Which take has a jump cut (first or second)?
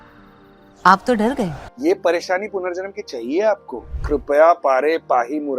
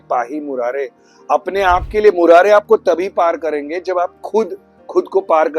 first